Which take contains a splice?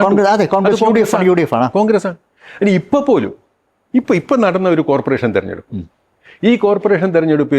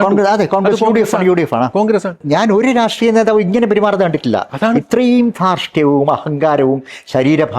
second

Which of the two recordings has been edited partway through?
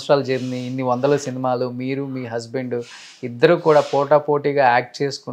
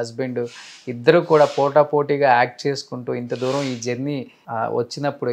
second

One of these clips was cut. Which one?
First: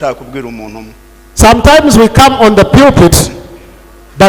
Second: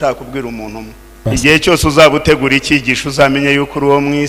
second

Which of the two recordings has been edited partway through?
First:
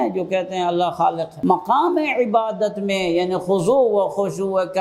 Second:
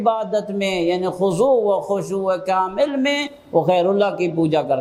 first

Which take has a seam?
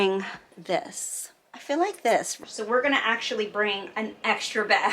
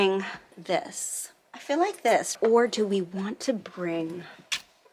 first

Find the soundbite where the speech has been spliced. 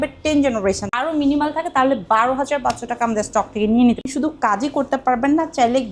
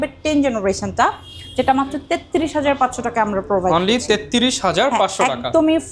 first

